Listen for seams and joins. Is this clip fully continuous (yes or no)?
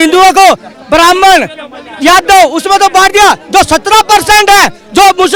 yes